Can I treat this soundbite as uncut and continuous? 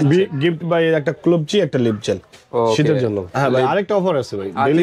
no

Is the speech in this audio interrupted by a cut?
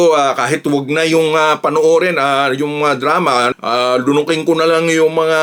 no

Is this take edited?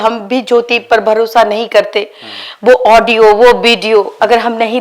no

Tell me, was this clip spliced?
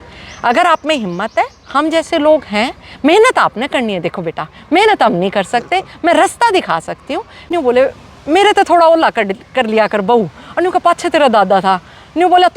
yes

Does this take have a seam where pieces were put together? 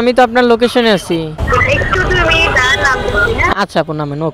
no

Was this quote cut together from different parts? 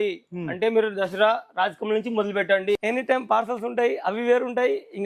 yes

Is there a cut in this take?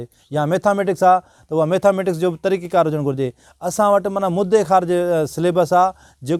no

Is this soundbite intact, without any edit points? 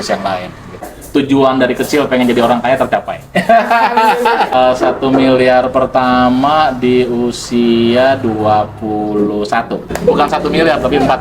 no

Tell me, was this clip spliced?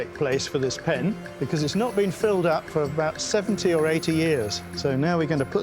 yes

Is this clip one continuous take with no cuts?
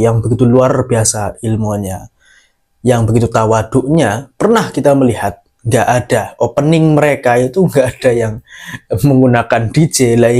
yes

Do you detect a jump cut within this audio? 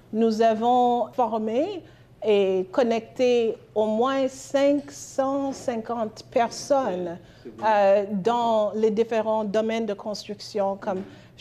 yes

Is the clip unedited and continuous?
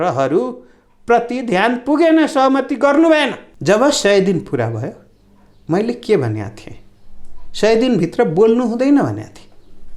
no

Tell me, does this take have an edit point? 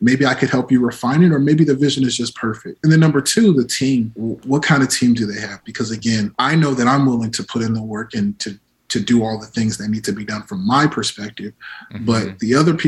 yes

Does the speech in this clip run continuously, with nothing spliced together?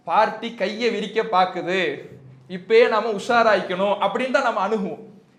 yes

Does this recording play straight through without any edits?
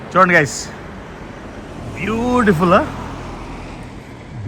yes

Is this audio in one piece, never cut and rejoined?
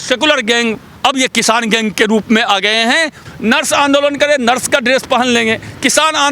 no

